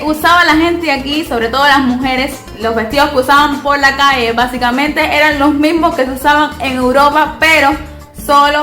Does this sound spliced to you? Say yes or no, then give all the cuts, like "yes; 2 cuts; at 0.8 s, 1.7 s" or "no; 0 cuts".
no; 0 cuts